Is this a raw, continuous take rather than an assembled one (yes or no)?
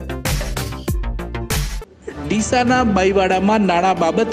no